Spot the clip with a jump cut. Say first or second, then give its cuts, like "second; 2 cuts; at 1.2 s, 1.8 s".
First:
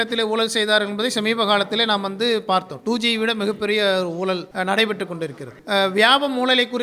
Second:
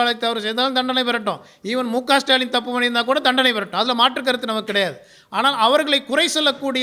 first; 2 cuts; at 4.5 s, 5.5 s